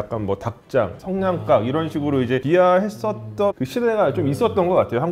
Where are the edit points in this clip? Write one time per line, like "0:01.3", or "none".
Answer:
0:02.4
0:03.5